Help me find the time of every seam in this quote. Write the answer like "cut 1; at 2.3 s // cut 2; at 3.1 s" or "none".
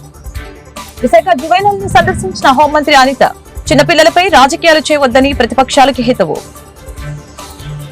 none